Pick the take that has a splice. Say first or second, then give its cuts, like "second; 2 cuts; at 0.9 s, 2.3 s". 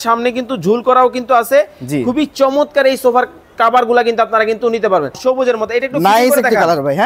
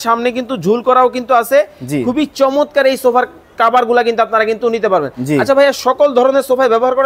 first; 1 cut; at 5.2 s